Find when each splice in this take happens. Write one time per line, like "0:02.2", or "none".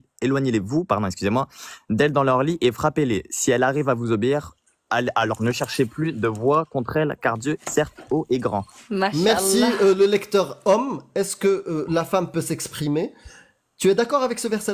none